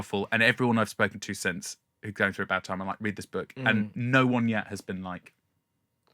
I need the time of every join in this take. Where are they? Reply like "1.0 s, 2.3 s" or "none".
none